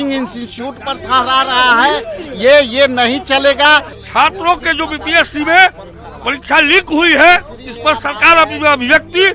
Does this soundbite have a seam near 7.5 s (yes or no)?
no